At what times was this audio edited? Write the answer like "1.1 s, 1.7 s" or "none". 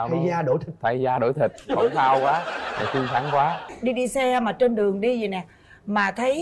3.6 s

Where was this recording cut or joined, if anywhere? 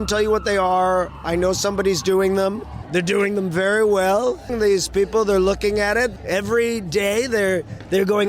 2.7 s, 4.5 s, 6.1 s

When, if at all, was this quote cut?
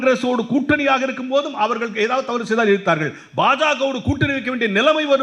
none

